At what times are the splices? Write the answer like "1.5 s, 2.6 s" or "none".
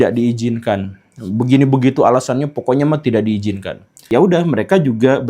4.1 s